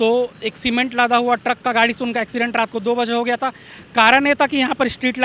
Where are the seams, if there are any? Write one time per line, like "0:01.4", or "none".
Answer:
none